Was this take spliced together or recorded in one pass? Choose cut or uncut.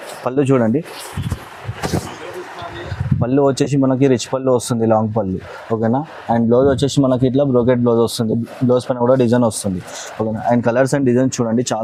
uncut